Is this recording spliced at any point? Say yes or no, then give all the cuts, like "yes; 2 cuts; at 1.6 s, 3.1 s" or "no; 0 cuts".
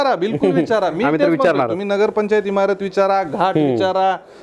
no; 0 cuts